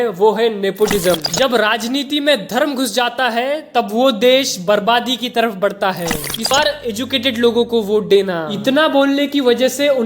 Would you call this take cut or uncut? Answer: cut